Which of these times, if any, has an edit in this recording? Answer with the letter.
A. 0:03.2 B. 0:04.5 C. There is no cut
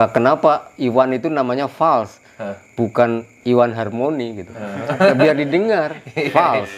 C